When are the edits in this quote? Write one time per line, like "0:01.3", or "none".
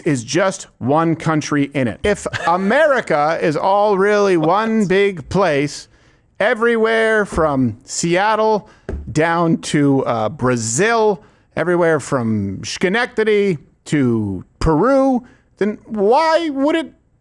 0:02.0